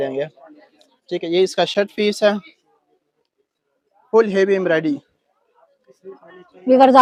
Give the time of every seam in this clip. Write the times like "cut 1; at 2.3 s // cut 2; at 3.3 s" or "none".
none